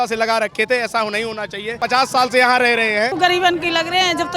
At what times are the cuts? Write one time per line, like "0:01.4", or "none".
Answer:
0:01.7
0:03.1